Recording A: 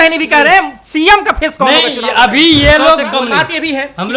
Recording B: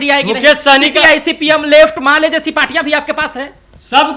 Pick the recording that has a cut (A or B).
A